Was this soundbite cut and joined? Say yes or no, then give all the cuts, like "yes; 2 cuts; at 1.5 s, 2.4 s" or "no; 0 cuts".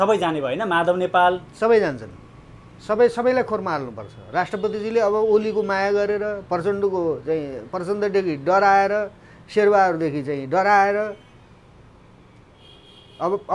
no; 0 cuts